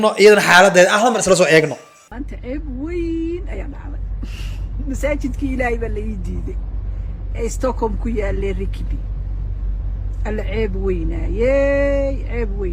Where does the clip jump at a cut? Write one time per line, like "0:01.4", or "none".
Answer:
none